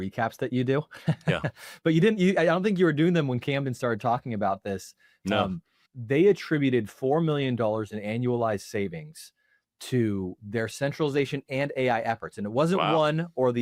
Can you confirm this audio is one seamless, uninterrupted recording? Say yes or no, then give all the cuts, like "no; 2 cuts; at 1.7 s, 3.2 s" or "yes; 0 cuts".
yes; 0 cuts